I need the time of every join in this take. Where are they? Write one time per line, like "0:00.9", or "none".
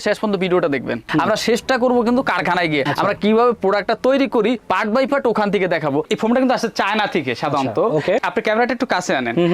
0:01.1
0:06.0

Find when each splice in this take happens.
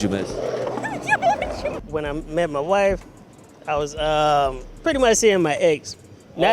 0:01.8

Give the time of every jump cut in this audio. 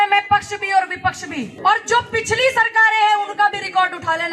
0:01.5

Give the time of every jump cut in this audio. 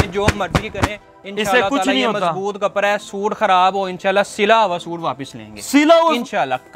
none

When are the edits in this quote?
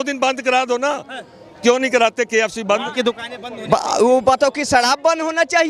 0:02.8

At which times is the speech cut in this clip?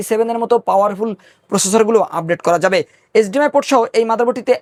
none

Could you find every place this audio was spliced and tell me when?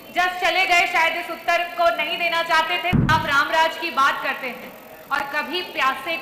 0:03.1

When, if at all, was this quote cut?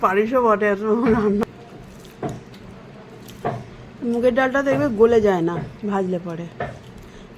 0:01.4

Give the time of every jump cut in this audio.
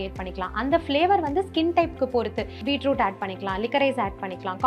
0:02.6

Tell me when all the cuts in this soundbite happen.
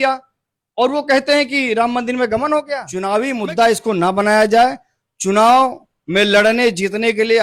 0:02.8

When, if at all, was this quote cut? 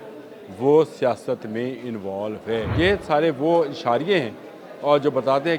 0:02.7

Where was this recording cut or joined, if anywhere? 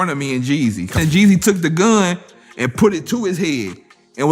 0:00.9

